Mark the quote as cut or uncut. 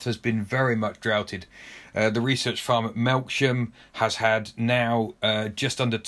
uncut